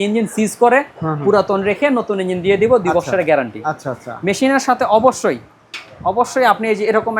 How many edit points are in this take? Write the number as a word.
zero